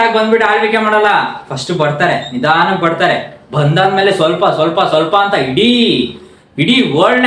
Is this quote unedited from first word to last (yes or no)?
yes